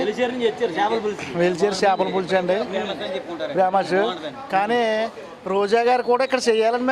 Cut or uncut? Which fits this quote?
uncut